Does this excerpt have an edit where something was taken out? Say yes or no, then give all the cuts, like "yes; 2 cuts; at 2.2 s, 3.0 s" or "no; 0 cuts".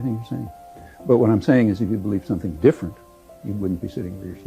no; 0 cuts